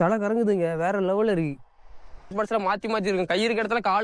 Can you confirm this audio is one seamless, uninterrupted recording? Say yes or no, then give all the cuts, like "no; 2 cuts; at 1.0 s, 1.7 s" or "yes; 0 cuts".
no; 1 cut; at 2.3 s